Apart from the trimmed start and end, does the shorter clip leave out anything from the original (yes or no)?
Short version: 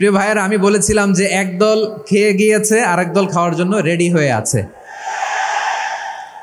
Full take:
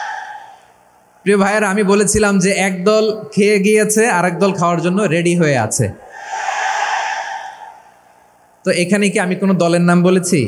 no